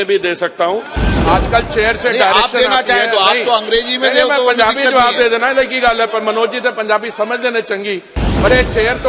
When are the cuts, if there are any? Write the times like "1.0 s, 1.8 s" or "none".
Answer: 0.9 s